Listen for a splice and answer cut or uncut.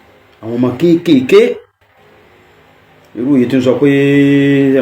uncut